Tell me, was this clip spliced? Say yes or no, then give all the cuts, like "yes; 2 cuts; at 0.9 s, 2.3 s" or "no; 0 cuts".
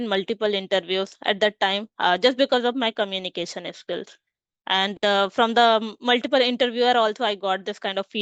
no; 0 cuts